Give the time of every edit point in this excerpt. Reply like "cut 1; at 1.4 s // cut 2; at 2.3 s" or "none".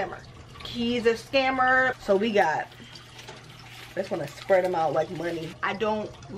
cut 1; at 2.0 s // cut 2; at 5.4 s